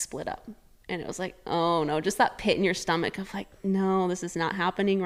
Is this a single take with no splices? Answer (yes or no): yes